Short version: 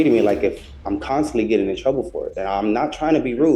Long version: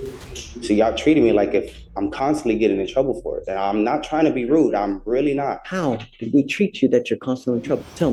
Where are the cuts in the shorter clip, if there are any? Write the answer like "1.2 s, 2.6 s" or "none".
none